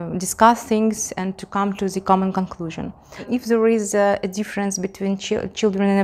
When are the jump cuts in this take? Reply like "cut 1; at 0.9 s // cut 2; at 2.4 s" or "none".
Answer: cut 1; at 3.3 s